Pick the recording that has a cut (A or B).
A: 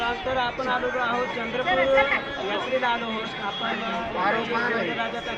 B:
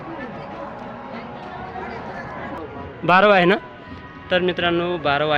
B